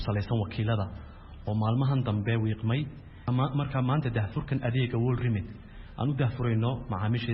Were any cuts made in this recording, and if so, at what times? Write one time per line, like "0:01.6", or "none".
0:03.2